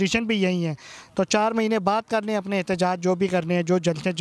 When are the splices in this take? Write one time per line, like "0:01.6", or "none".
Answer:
none